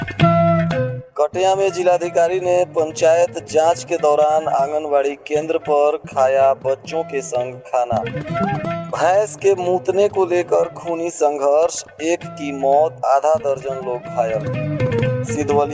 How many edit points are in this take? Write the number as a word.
one